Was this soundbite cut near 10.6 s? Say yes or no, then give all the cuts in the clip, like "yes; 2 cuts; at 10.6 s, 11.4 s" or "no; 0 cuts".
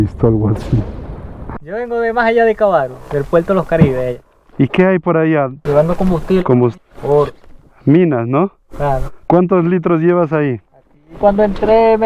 no; 4 cuts; at 1.5 s, 5.6 s, 6.8 s, 9.1 s